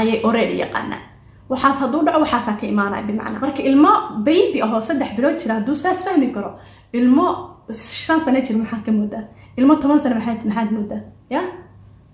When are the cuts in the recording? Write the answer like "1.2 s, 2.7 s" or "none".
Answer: 3.4 s